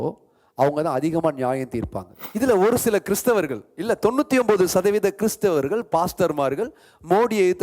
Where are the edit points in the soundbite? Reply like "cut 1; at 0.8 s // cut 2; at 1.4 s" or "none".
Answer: cut 1; at 2.2 s